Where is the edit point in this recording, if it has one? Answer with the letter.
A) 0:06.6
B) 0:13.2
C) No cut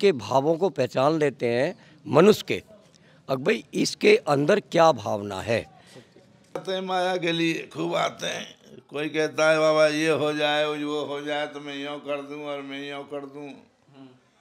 A